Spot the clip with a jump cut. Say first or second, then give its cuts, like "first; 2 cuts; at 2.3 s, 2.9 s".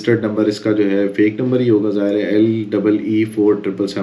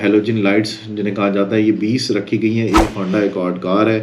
second; 1 cut; at 2.8 s